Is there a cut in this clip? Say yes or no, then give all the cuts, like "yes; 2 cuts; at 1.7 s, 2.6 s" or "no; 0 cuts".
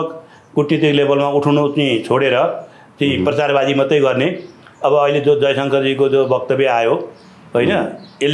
no; 0 cuts